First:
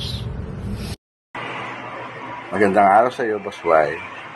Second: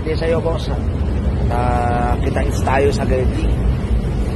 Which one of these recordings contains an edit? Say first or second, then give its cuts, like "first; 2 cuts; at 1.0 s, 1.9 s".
first; 1 cut; at 1.1 s